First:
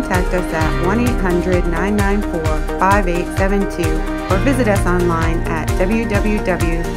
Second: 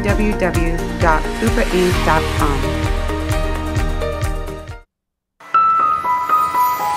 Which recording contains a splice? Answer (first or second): second